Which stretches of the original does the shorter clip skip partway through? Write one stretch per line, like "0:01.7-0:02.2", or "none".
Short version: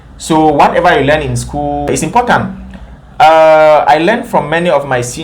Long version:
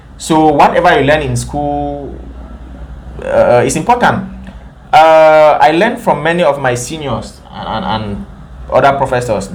0:01.9-0:03.6